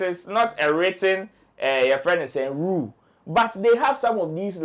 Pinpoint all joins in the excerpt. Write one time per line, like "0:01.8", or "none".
none